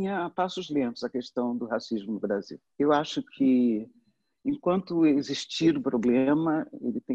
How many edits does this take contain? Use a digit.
0